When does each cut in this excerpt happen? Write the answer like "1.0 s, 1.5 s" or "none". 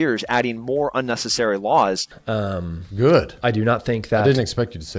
2.0 s